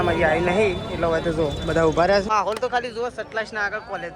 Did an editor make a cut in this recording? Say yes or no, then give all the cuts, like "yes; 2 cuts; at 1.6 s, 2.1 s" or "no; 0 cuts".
yes; 1 cut; at 2.3 s